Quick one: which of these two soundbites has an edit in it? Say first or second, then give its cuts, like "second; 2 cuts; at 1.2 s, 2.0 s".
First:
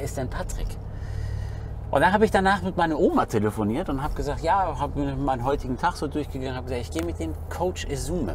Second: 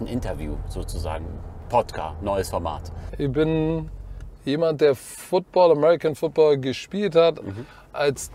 second; 1 cut; at 3.1 s